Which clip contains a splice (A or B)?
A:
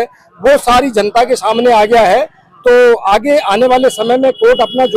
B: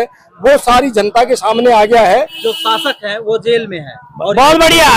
B